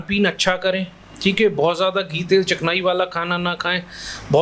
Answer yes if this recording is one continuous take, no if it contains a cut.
yes